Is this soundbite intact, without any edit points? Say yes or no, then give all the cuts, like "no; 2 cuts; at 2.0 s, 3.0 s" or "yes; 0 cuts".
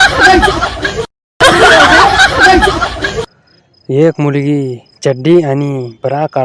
yes; 0 cuts